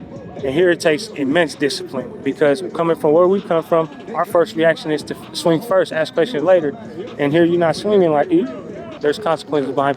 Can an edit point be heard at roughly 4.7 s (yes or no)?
no